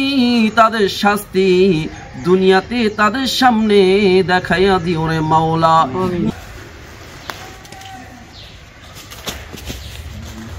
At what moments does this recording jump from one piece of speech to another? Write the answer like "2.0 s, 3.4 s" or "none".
6.2 s